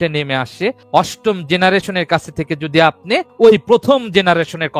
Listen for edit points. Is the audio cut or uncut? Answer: cut